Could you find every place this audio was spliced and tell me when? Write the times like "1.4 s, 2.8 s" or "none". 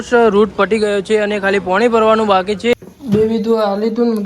2.7 s